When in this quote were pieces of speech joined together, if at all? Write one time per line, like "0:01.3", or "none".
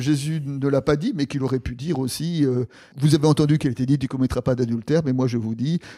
0:02.9